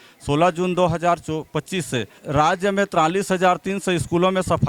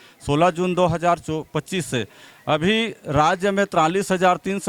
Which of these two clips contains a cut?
first; 1 cut; at 2.2 s

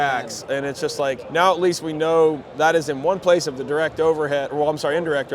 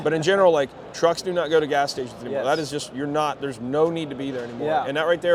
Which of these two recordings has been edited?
first; 2 cuts; at 1.2 s, 2.5 s

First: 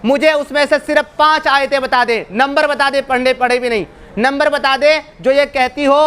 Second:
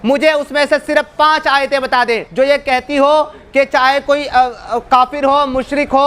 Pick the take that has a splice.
second; 1 cut; at 2.3 s

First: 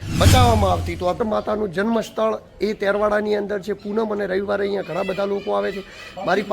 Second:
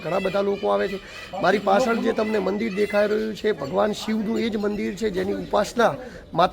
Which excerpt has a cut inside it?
first; 1 cut; at 1.2 s

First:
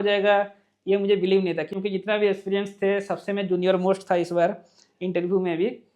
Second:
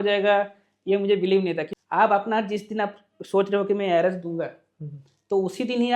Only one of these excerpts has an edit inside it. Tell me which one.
second; 1 cut; at 1.7 s

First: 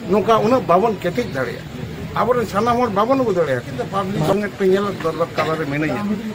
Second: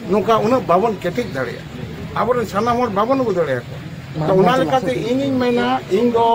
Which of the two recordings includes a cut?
first; 1 cut; at 4.3 s

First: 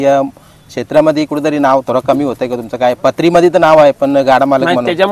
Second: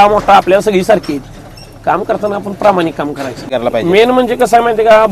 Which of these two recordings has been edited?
second; 1 cut; at 3.5 s

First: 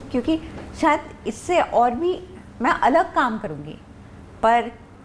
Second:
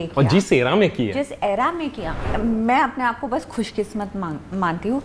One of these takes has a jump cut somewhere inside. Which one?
second; 1 cut; at 2.3 s

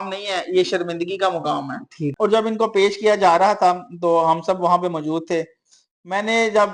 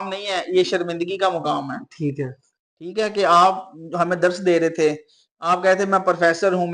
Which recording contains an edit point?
first; 1 cut; at 2.1 s

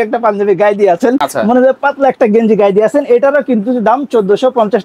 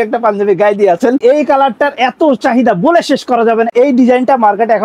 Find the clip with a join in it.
second; 2 cuts; at 1.2 s, 3.7 s

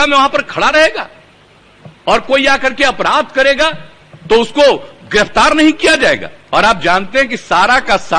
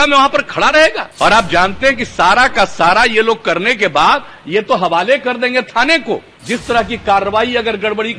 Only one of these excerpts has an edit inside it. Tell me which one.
second; 2 cuts; at 1.1 s, 6.3 s

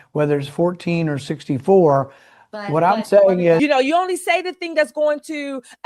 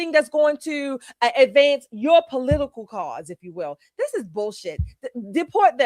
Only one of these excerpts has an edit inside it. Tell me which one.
first; 1 cut; at 3.6 s

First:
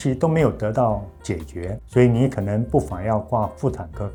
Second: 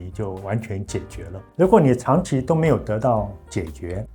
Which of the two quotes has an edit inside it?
second; 1 cut; at 1.4 s

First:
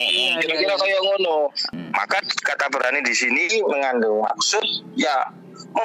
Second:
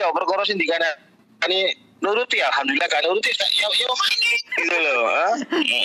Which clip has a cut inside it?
first; 1 cut; at 1.7 s

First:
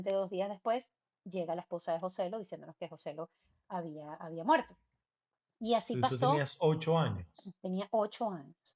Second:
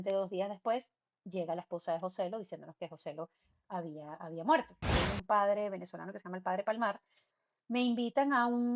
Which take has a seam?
second; 1 cut; at 4.9 s

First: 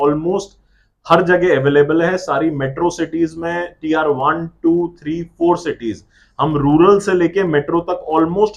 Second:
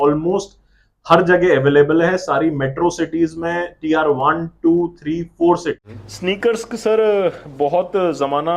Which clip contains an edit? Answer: second; 1 cut; at 5.8 s

